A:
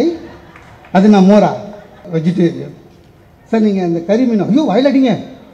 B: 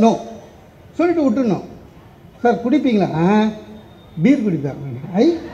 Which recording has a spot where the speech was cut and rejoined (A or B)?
A